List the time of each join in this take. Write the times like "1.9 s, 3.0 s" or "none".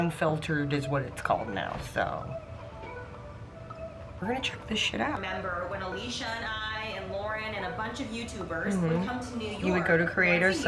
5.2 s